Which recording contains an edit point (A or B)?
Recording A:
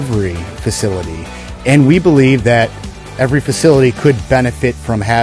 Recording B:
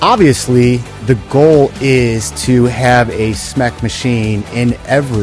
B